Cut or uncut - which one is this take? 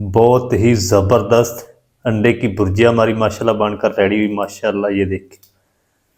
uncut